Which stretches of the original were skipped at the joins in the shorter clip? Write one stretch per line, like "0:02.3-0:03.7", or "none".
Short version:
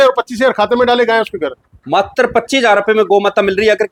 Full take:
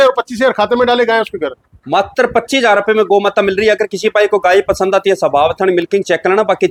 none